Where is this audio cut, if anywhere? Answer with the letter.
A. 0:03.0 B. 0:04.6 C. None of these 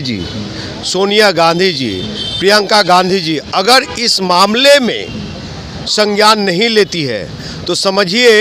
C